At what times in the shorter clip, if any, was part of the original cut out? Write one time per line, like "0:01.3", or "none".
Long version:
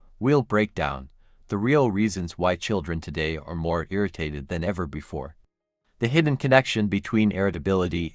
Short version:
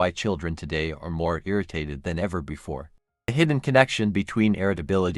0:03.3